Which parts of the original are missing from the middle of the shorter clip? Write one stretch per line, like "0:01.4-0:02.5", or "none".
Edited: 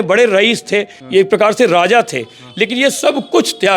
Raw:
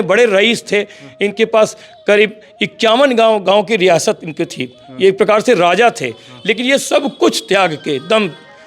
0:01.0-0:04.8